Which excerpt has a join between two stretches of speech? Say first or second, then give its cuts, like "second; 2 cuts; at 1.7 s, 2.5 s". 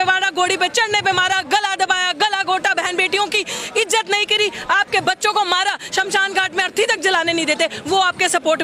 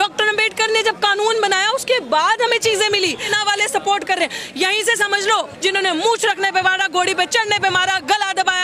second; 2 cuts; at 3.3 s, 5.5 s